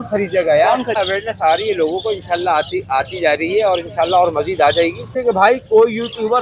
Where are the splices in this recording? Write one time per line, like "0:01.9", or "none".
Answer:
0:00.9
0:05.1